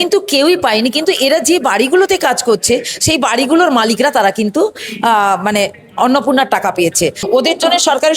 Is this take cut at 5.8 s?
no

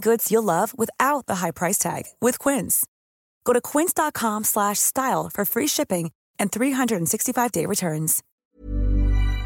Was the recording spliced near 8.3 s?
yes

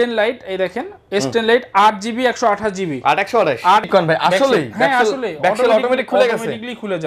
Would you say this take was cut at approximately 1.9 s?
no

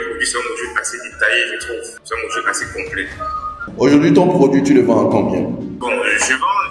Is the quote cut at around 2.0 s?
yes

